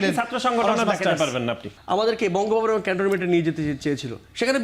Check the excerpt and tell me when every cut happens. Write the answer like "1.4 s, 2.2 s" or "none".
1.7 s